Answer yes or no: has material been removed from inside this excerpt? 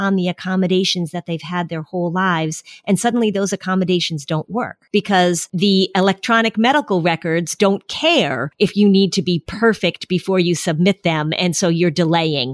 yes